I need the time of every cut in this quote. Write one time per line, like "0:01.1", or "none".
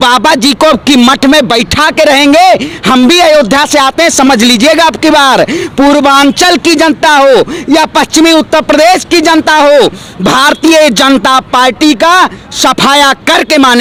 none